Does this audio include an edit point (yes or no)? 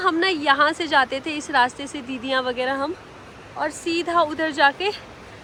no